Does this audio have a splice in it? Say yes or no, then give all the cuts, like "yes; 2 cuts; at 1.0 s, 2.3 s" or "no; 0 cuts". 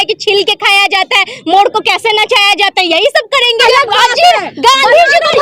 yes; 1 cut; at 3.6 s